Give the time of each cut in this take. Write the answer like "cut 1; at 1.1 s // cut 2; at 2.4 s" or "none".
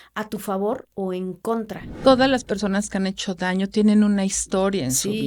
cut 1; at 1.8 s